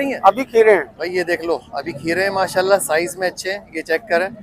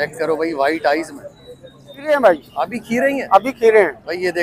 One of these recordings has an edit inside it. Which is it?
second; 1 cut; at 2.1 s

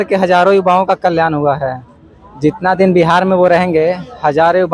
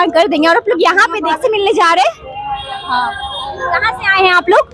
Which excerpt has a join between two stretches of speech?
second; 1 cut; at 1.4 s

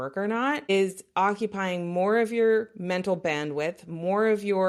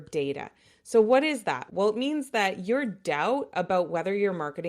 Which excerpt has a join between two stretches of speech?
second; 1 cut; at 1.6 s

